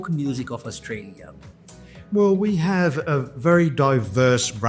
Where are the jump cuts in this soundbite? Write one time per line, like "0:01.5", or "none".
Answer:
none